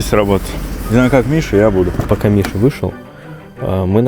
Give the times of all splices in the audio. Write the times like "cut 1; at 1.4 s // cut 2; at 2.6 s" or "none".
cut 1; at 2.0 s